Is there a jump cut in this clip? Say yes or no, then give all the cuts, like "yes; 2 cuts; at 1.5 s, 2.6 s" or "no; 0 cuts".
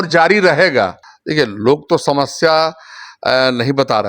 yes; 1 cut; at 1.1 s